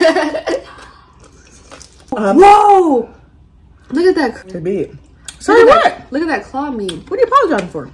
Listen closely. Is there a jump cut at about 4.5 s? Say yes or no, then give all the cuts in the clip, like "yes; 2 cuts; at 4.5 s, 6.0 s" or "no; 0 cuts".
yes; 2 cuts; at 2.1 s, 4.5 s